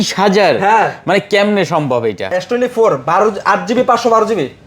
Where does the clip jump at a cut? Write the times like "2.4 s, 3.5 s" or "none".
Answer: 2.3 s